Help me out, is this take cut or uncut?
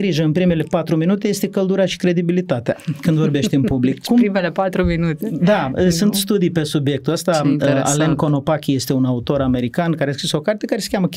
uncut